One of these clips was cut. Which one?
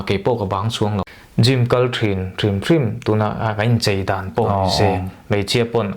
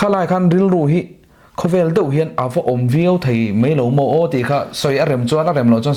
first; 1 cut; at 1.1 s

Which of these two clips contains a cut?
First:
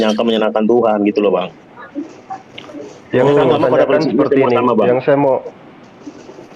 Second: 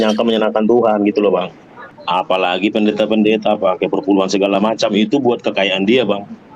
second; 1 cut; at 1.9 s

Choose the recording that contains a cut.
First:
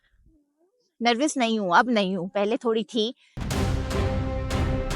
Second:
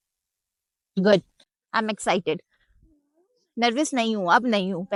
first; 1 cut; at 3.3 s

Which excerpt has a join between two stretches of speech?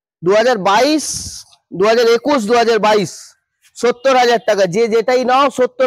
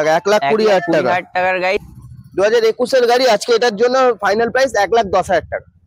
second; 1 cut; at 1.9 s

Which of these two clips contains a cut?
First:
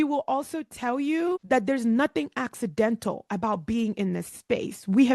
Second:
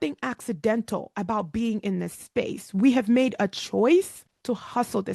second; 1 cut; at 4.2 s

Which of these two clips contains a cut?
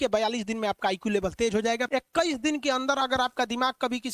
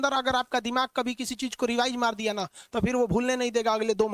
first; 1 cut; at 1.8 s

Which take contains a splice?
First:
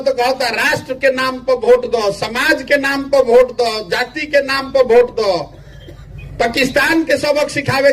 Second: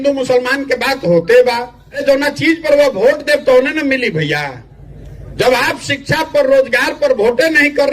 second; 1 cut; at 2.0 s

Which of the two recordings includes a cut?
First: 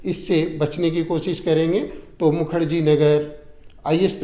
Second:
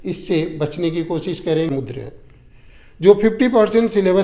second; 1 cut; at 1.7 s

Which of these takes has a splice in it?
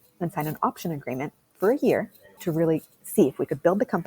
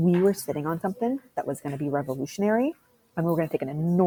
first; 1 cut; at 2.3 s

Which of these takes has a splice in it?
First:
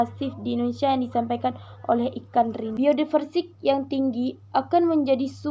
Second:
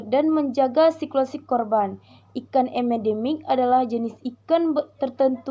first; 1 cut; at 2.7 s

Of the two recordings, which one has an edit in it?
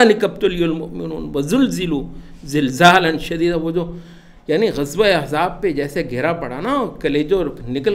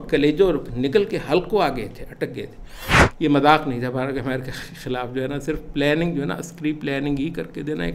second; 1 cut; at 3.1 s

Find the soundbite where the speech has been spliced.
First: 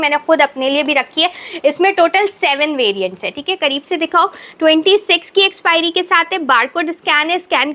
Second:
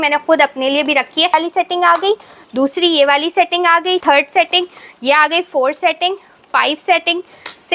second; 2 cuts; at 1.3 s, 4.0 s

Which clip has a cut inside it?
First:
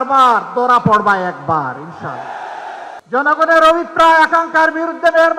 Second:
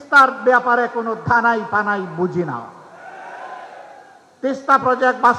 first; 1 cut; at 3.0 s

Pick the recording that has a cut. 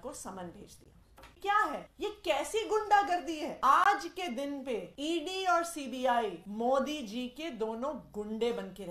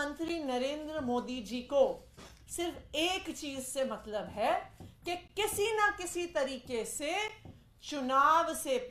first; 5 cuts; at 1.4 s, 1.9 s, 3.5 s, 4.9 s, 6.4 s

